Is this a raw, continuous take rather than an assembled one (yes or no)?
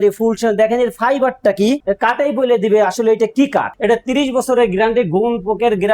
no